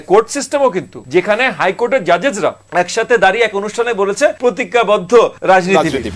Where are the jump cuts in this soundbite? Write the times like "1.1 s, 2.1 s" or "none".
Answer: 1.0 s, 2.6 s, 4.4 s, 5.4 s